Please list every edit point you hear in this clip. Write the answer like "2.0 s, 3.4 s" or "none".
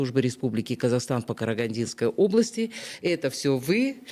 none